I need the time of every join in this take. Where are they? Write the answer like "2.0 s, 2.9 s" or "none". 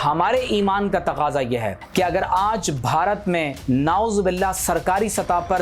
1.8 s, 3.6 s